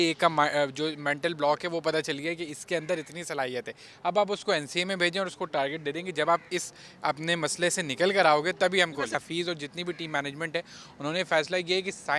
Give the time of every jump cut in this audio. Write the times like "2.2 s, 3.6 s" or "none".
9.2 s

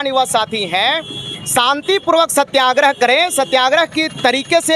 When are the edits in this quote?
none

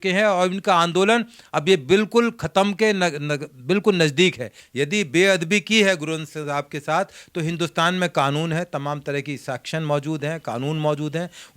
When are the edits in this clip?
4.6 s

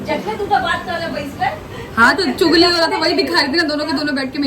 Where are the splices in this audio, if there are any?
none

